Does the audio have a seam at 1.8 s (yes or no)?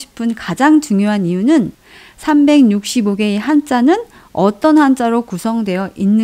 yes